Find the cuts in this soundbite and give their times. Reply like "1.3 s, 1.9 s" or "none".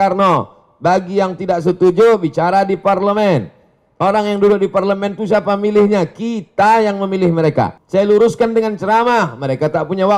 7.8 s